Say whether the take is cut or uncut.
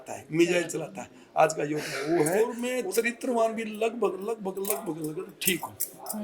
cut